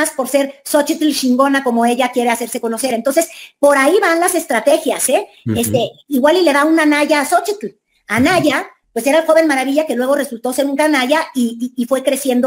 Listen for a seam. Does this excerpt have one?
no; 0 cuts

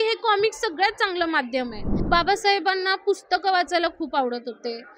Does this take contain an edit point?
yes; 1 cut; at 1.9 s

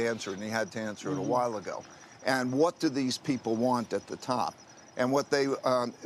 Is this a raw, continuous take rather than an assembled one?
yes; 0 cuts

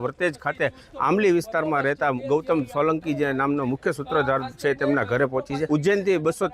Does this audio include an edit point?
yes; 1 cut; at 5.6 s

